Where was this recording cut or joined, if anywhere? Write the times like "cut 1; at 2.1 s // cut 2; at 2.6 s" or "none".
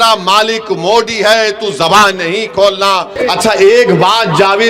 cut 1; at 3.2 s